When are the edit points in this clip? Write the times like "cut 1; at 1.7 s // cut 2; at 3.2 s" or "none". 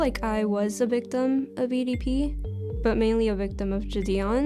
cut 1; at 2.8 s

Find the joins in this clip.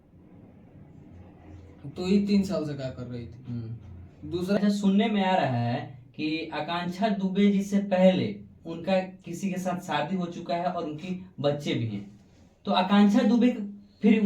cut 1; at 4.6 s

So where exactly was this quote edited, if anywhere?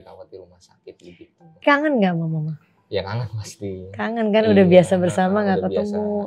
cut 1; at 1.6 s

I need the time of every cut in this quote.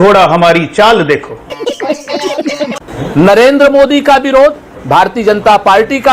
cut 1; at 2.9 s

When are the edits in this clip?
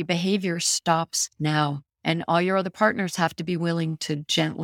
none

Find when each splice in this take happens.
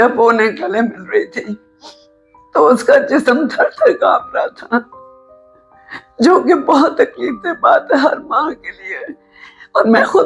none

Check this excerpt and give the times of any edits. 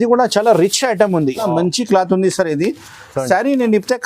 cut 1; at 1.4 s

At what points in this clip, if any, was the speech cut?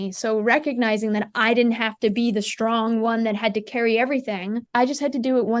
cut 1; at 4.6 s

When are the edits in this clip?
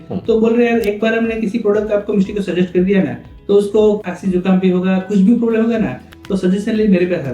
cut 1; at 4.0 s

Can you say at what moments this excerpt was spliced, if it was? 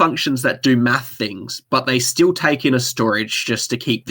none

